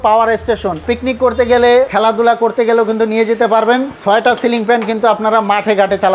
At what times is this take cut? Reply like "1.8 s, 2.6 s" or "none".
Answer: 0.8 s, 1.9 s, 3.9 s